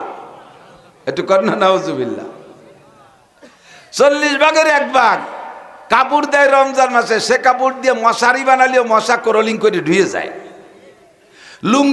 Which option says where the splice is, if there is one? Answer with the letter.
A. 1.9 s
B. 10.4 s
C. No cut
C